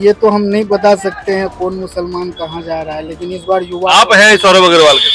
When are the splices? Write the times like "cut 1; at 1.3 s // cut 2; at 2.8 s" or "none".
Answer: none